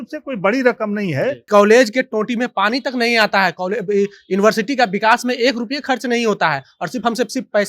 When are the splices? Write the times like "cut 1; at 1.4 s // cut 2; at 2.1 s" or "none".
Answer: cut 1; at 1.4 s